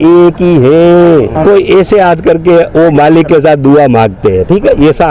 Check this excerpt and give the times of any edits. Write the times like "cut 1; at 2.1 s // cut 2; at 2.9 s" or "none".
cut 1; at 1.3 s